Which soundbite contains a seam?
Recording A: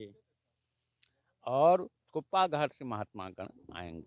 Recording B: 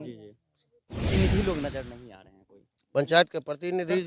B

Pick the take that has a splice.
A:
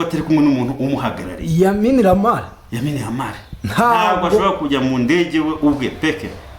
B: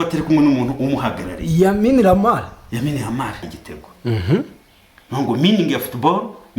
B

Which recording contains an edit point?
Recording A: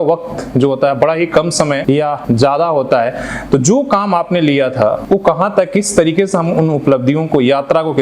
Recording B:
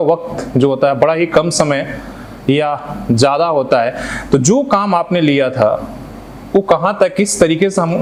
A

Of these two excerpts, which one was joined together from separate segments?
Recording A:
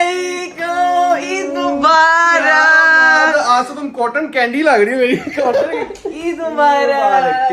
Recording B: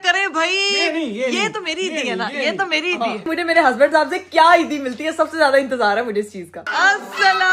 B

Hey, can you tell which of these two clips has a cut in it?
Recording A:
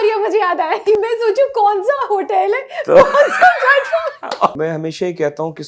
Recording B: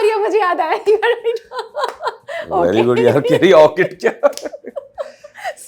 A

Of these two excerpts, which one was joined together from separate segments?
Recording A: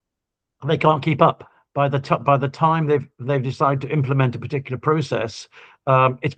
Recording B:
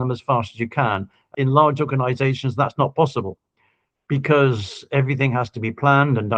B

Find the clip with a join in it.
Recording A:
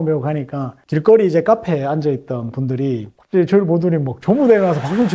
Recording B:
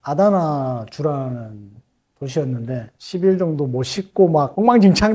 B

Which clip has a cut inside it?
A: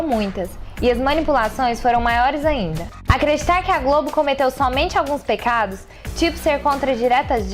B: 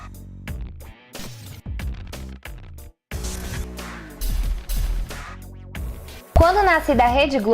B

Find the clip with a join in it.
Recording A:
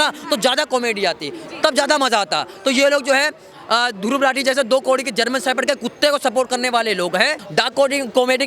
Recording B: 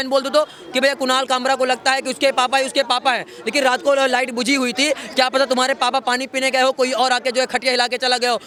A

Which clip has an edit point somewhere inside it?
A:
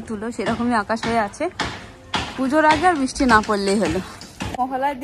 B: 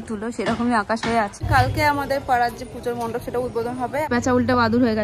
B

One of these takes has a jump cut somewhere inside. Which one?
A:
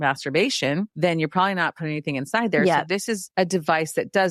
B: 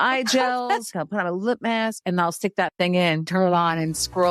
B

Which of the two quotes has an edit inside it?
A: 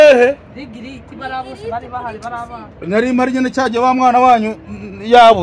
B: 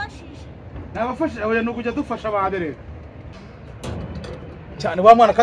B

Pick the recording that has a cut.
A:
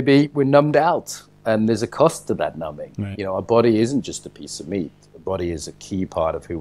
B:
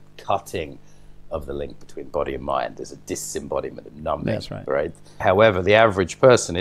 B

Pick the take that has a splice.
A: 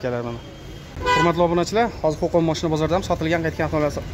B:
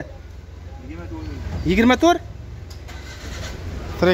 A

